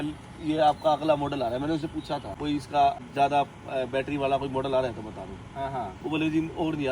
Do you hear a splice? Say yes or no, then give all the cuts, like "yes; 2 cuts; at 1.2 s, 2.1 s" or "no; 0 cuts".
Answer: yes; 2 cuts; at 2.3 s, 3.1 s